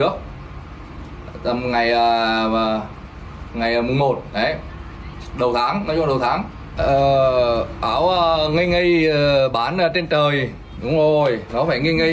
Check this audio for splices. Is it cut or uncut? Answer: cut